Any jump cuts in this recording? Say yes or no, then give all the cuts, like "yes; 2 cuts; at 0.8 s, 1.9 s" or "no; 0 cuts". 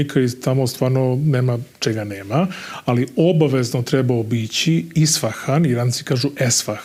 no; 0 cuts